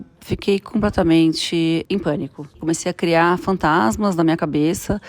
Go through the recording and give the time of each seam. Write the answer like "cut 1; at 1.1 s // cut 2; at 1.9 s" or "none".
cut 1; at 2.4 s